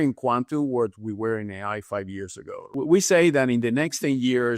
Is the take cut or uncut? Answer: cut